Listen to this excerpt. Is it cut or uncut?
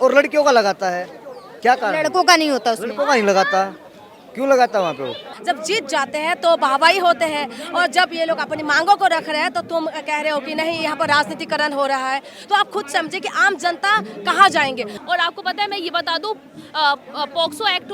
uncut